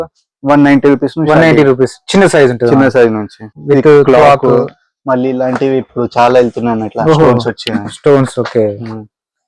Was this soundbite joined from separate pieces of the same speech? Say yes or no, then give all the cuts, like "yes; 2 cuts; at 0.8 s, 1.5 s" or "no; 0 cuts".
no; 0 cuts